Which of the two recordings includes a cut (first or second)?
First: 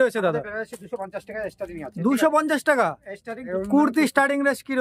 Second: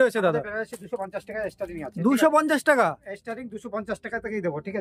first